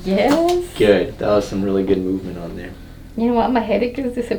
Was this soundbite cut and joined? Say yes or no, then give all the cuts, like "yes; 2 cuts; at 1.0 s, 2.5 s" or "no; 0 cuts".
no; 0 cuts